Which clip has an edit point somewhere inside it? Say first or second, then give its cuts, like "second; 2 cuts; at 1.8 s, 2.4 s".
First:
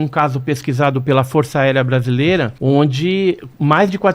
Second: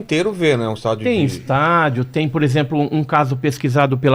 first; 1 cut; at 2.5 s